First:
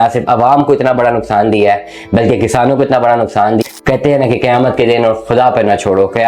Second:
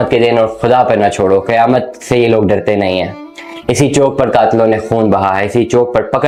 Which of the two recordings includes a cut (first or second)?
first